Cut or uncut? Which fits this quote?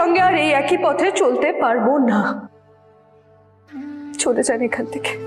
uncut